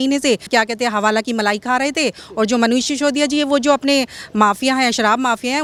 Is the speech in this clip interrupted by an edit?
no; 0 cuts

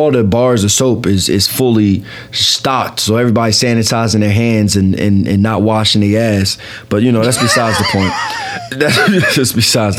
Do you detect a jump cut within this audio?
no; 0 cuts

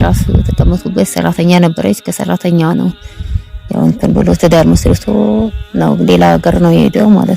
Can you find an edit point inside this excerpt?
no; 0 cuts

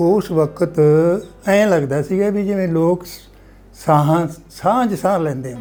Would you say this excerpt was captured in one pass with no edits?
yes; 0 cuts

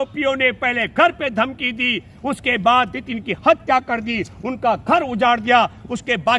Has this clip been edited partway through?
no; 0 cuts

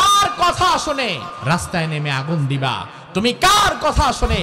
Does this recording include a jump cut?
yes; 1 cut; at 1.3 s

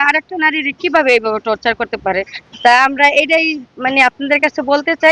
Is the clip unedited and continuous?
yes; 0 cuts

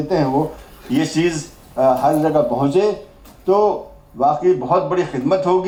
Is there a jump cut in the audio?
no; 0 cuts

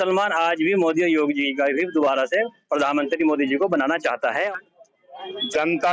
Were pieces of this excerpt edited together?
yes; 1 cut; at 4.5 s

